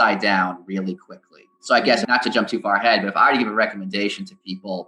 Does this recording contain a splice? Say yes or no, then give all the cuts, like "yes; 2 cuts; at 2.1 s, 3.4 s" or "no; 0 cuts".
yes; 1 cut; at 2.0 s